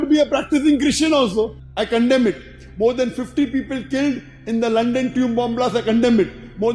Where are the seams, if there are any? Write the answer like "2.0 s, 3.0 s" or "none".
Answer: 1.6 s